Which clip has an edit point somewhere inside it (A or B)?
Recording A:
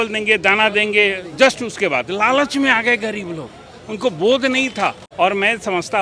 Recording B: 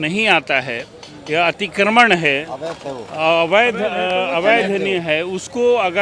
A